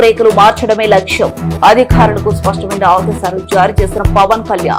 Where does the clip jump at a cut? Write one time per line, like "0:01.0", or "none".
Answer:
none